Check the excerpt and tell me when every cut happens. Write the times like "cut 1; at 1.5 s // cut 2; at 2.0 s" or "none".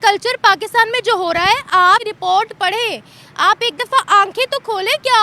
cut 1; at 2.1 s